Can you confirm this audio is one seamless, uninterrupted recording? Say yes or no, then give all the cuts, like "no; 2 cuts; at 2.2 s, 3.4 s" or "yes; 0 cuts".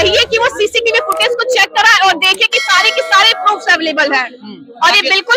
yes; 0 cuts